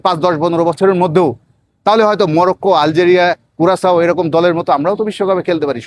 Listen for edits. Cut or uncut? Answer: uncut